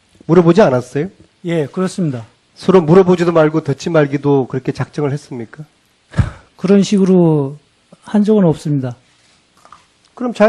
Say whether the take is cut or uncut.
cut